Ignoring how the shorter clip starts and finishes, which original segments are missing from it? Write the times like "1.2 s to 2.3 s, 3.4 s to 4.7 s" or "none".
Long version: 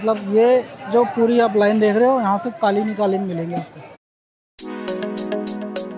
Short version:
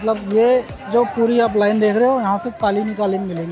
none

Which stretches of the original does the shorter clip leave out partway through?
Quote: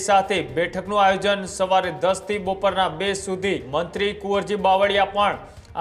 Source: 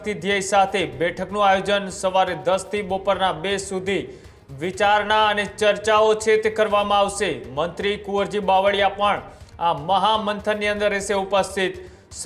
4.1 s to 7.5 s

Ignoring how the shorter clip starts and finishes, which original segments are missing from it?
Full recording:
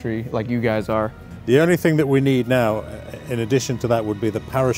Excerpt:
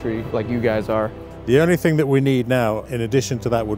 2.9 s to 3.3 s

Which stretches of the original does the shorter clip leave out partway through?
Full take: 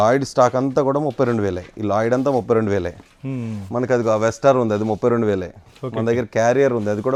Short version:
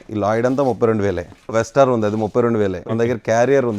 3.2 s to 4.2 s, 5.5 s to 5.9 s

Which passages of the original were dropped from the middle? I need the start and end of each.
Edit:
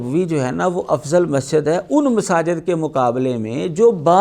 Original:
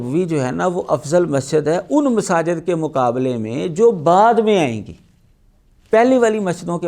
none

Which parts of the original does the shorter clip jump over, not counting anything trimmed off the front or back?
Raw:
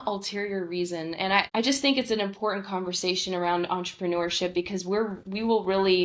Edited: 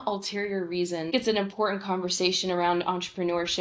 1.1 s to 2.0 s

